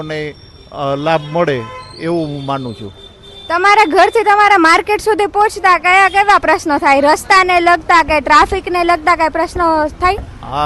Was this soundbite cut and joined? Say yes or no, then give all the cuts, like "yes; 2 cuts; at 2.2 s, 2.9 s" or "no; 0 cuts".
no; 0 cuts